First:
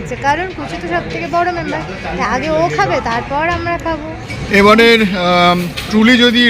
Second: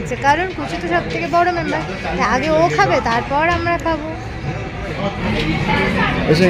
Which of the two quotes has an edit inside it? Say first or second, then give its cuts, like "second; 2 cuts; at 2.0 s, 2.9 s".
first; 1 cut; at 4.5 s